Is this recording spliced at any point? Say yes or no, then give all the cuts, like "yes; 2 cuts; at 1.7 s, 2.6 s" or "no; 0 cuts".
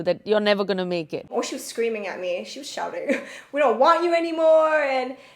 yes; 1 cut; at 1.3 s